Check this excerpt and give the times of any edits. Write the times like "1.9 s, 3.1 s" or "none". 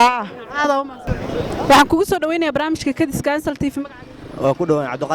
0.9 s